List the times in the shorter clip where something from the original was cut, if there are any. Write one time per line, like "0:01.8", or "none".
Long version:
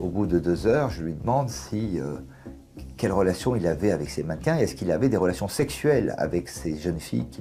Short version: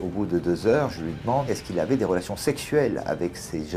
0:01.5

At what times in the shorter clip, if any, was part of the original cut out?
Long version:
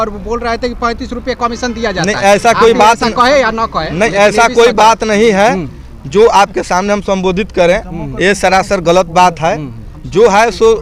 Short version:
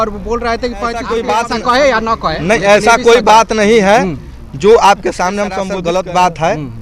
0:01.0
0:05.7

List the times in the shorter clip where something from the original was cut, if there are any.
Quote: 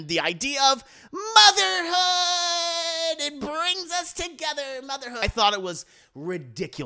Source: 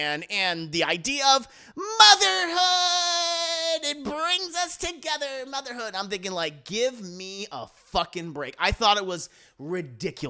0:05.2

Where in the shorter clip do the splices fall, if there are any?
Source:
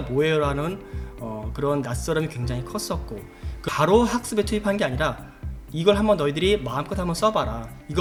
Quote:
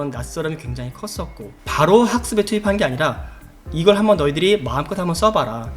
0:01.7

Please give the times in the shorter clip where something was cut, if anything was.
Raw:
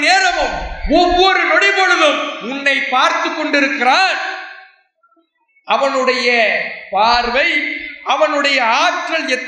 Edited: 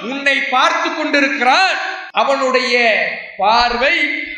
0:01.9

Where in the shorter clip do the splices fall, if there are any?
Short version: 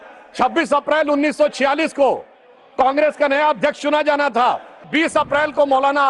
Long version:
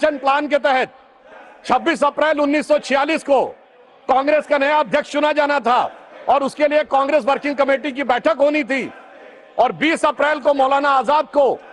0:04.9

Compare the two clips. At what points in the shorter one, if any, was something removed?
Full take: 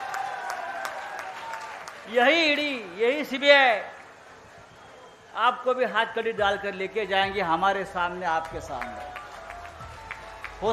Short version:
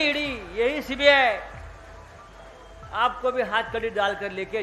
none

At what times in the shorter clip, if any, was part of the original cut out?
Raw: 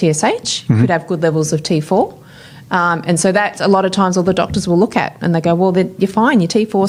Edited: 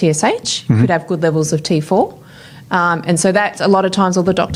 none

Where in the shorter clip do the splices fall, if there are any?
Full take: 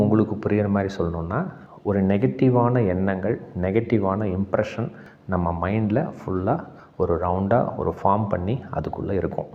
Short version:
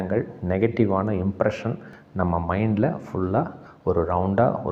none

